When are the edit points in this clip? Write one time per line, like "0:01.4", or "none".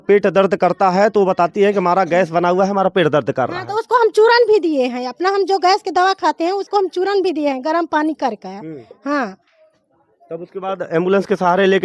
none